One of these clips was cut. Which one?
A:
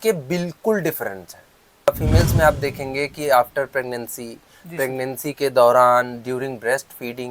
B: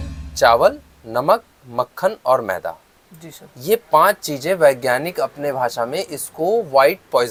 A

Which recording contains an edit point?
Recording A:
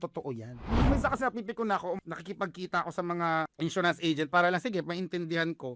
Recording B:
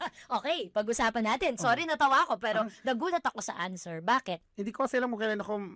A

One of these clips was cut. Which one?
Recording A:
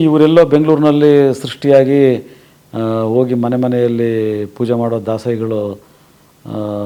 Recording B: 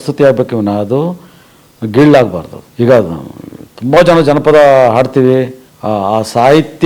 B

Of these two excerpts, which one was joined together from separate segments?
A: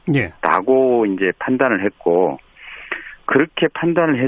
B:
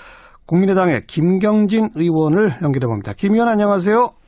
A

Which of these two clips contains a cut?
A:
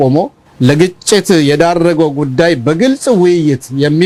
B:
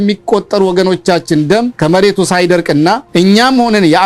B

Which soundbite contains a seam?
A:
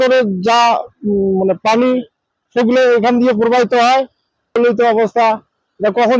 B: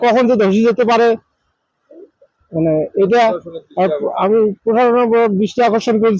A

